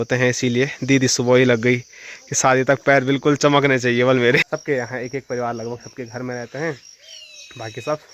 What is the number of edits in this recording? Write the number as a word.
one